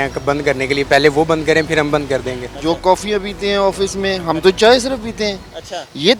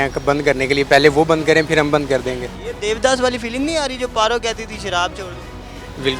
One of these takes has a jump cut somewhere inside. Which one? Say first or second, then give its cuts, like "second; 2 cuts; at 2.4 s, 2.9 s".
first; 1 cut; at 2.5 s